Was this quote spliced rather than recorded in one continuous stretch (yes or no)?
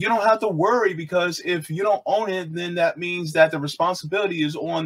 no